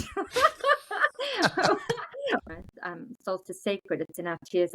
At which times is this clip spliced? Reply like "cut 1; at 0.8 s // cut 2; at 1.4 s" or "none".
cut 1; at 2.4 s